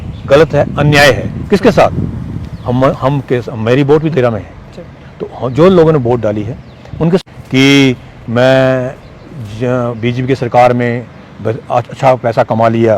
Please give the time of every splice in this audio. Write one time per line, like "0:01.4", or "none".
0:07.2